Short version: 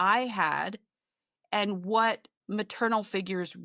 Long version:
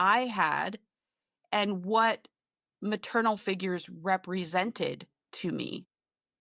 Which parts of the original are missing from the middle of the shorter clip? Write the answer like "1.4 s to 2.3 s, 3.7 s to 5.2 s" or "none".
2.3 s to 2.7 s